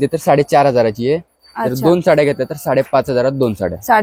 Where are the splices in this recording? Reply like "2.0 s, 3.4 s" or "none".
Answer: none

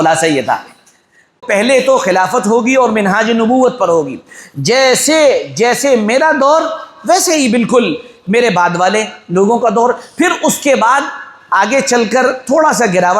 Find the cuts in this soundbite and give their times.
1.4 s

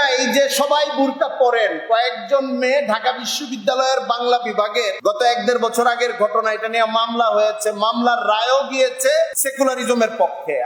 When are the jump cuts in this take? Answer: 4.9 s, 9.4 s

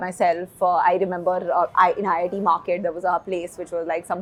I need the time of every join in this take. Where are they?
none

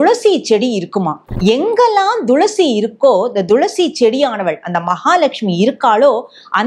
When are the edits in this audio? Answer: 1.3 s

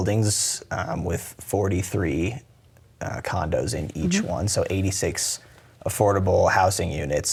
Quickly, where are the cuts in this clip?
none

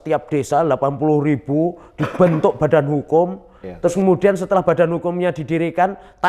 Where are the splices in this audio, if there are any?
none

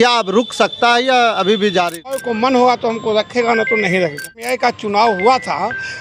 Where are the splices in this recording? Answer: 2.2 s, 4.4 s

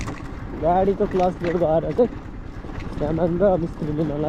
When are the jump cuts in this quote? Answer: none

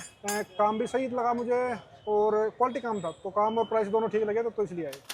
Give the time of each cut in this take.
none

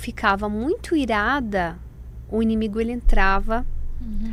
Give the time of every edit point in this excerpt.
none

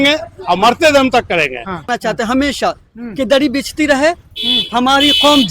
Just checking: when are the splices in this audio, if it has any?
1.8 s

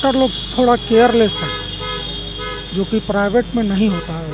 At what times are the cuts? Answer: none

